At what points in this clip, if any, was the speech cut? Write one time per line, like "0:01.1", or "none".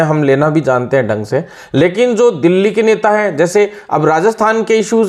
none